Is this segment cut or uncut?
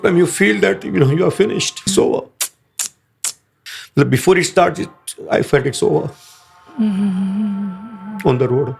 cut